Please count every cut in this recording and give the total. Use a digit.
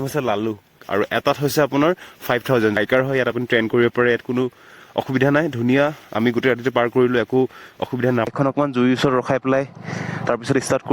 3